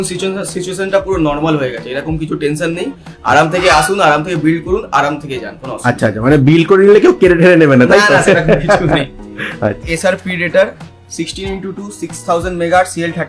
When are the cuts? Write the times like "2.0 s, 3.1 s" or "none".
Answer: 9.9 s